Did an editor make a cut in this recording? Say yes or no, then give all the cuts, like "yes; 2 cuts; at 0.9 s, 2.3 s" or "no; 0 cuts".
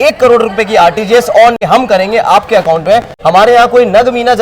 yes; 2 cuts; at 1.6 s, 3.1 s